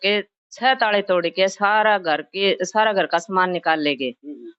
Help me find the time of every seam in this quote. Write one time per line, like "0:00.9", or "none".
none